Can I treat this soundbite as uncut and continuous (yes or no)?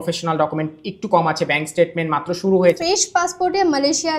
no